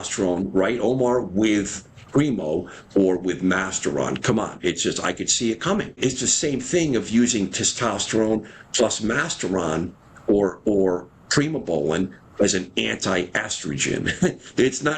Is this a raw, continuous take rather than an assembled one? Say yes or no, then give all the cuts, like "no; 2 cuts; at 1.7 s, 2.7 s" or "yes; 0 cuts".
no; 1 cut; at 6.0 s